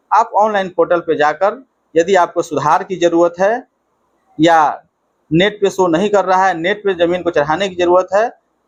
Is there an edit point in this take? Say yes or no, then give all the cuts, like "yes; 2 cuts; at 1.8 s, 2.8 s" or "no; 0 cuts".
no; 0 cuts